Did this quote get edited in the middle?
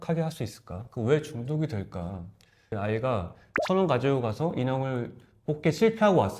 yes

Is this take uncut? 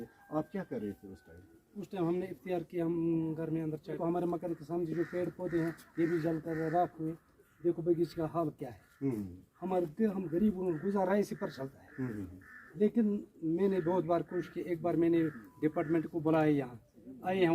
no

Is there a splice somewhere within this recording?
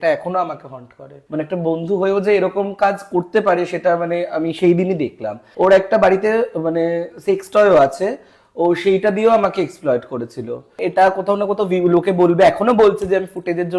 yes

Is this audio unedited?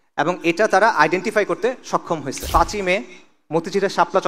no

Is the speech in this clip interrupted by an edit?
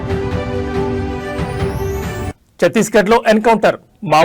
no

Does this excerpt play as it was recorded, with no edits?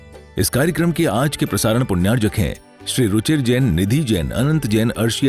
yes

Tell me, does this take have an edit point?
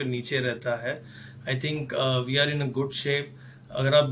no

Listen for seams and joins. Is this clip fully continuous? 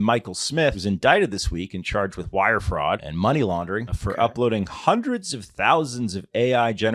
no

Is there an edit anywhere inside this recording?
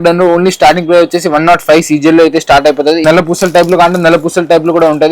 yes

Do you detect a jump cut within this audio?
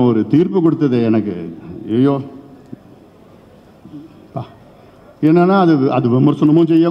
no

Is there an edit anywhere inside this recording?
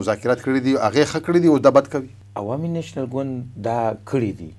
yes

